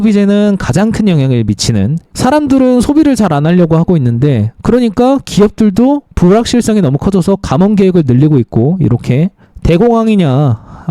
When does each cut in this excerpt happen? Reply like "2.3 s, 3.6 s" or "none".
2.0 s, 9.5 s